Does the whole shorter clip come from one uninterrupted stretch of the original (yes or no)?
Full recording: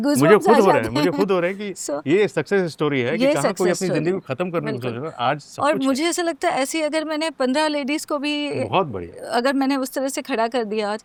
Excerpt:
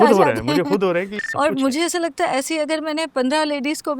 no